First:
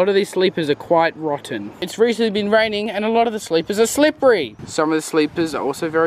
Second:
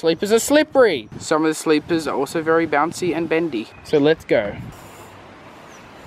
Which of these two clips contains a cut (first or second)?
second